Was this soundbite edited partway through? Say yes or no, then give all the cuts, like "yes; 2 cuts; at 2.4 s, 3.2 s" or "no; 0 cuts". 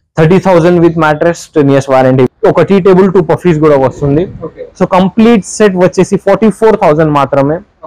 yes; 1 cut; at 2.3 s